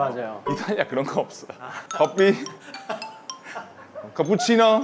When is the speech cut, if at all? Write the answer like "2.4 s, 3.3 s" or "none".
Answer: none